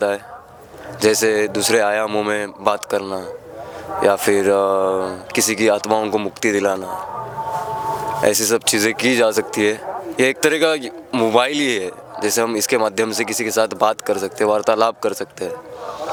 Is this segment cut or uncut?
uncut